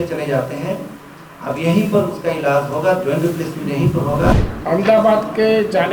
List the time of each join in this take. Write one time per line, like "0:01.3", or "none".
0:04.3